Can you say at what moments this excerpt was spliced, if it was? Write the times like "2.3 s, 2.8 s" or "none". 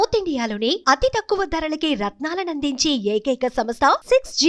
none